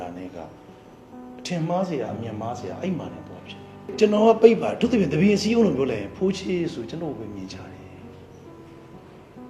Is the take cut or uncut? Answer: cut